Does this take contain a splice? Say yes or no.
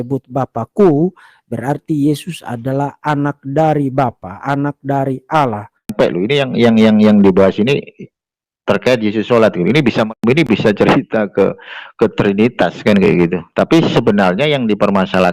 yes